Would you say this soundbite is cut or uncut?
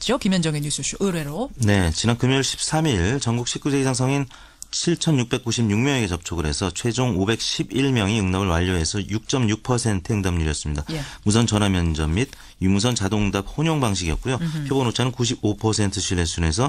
cut